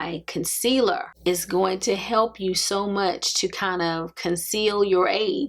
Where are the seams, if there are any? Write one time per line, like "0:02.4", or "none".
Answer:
none